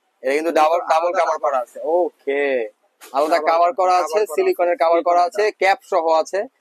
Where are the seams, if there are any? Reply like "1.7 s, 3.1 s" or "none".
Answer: none